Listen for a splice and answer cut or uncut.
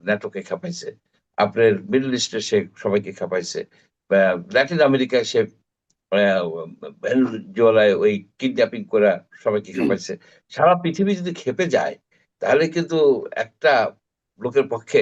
uncut